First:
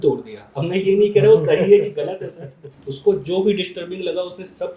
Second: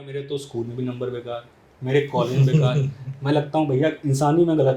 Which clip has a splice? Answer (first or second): first